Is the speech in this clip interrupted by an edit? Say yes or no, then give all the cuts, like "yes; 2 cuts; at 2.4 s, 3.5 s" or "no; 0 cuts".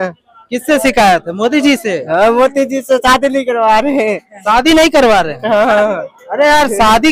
no; 0 cuts